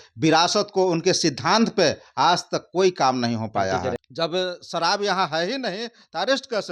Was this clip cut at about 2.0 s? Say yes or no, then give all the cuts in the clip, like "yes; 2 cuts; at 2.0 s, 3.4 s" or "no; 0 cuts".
no; 1 cut; at 4.0 s